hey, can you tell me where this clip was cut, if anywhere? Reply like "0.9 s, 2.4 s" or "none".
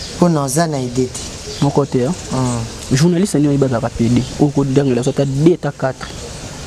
none